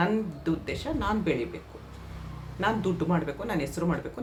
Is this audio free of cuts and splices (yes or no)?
yes